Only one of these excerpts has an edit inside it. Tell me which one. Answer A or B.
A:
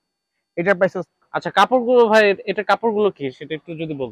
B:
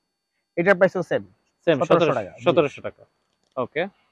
A